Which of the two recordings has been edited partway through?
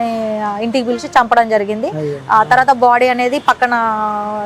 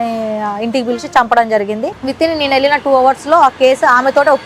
second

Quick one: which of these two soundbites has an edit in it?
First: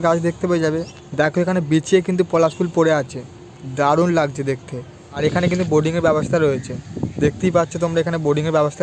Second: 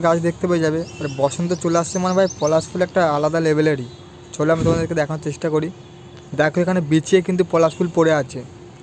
first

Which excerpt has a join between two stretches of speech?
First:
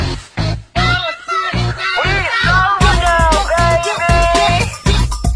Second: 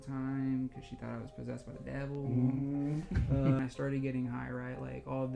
second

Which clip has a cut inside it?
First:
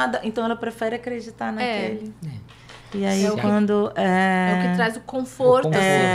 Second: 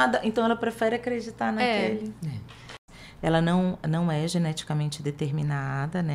second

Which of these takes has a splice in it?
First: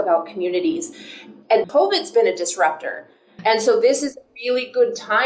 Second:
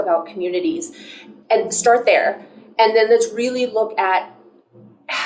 first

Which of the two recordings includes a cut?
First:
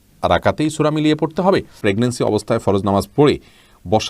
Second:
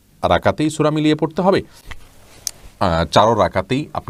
first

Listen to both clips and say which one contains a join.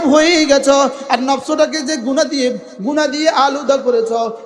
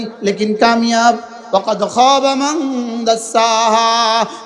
second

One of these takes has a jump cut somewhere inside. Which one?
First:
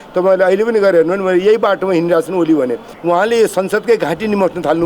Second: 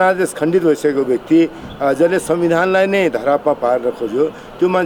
first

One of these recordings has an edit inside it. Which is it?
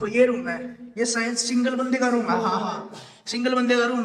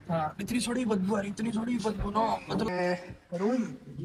second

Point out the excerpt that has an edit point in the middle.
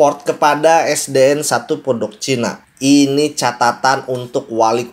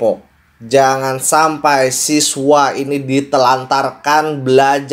first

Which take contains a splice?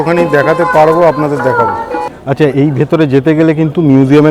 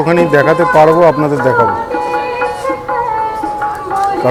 first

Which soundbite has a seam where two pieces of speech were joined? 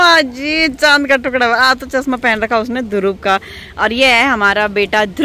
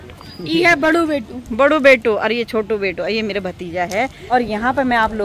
second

